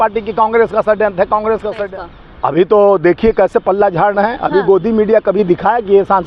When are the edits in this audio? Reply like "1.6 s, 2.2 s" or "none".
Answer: 1.8 s